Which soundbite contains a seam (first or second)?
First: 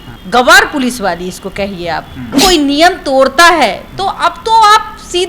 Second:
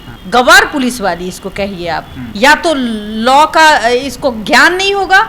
first